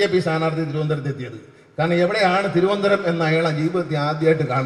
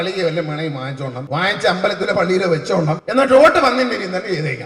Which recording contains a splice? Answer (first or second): second